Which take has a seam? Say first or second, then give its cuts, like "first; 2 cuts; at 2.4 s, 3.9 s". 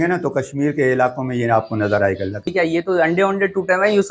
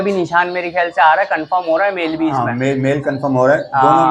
first; 1 cut; at 2.5 s